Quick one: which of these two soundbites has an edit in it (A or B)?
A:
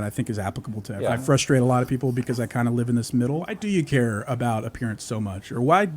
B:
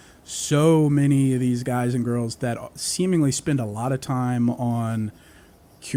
A